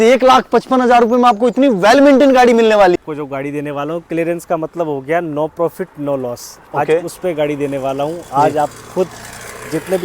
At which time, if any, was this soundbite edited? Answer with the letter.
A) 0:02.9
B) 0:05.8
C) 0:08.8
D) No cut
A